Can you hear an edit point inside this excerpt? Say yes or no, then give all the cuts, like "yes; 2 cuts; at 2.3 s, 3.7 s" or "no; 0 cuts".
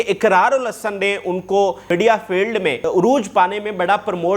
yes; 2 cuts; at 1.8 s, 2.9 s